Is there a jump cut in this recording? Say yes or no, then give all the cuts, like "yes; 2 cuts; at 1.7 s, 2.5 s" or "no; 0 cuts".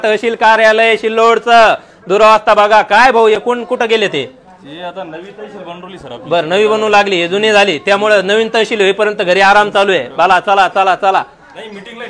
no; 0 cuts